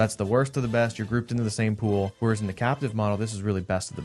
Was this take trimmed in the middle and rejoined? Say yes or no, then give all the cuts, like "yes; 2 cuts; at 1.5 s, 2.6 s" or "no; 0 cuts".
yes; 1 cut; at 2.1 s